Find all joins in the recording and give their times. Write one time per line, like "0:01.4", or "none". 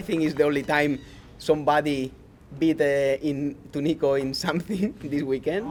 none